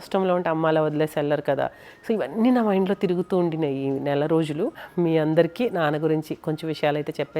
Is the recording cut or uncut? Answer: cut